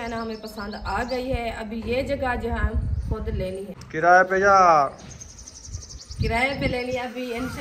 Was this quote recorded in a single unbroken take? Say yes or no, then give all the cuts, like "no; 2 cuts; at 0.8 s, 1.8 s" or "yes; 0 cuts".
no; 1 cut; at 3.8 s